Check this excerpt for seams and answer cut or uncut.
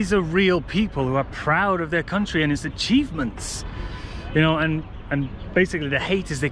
uncut